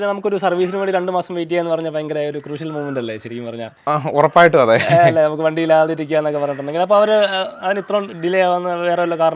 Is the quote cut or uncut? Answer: uncut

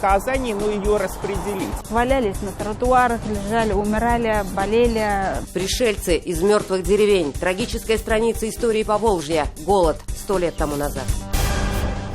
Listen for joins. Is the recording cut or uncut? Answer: cut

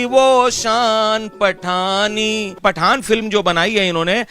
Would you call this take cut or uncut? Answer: cut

